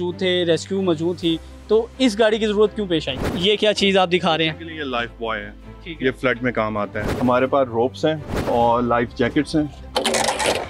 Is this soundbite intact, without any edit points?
no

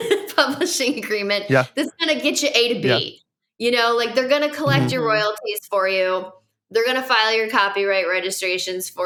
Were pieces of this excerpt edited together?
no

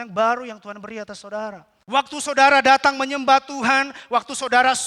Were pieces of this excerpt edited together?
yes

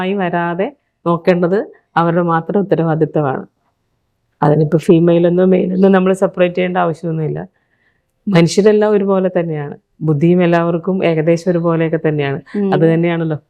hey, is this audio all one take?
yes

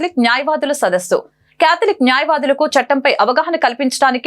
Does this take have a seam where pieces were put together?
no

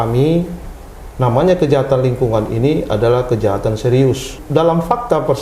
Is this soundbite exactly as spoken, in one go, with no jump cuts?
no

